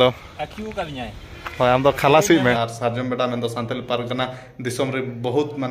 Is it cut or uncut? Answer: cut